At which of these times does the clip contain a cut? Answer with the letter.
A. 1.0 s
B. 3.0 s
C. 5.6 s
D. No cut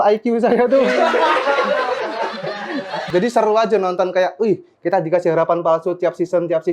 B